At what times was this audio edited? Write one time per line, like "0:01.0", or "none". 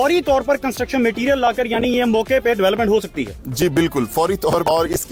none